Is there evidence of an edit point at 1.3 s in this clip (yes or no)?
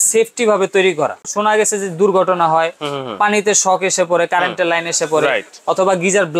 yes